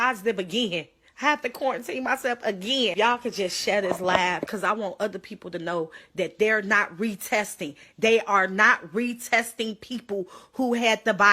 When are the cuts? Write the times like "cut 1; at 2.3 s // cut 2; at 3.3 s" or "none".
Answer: cut 1; at 2.9 s